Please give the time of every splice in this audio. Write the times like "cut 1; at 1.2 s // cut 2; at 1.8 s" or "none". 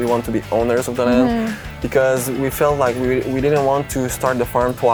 none